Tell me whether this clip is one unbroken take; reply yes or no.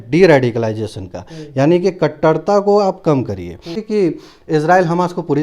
no